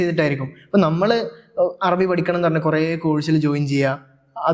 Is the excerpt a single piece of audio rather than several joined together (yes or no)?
yes